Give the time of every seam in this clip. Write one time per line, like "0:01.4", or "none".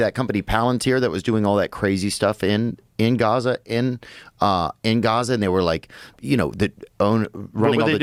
none